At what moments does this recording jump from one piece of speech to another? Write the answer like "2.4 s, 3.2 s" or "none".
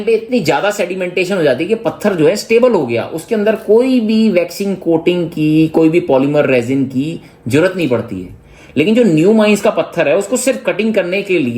none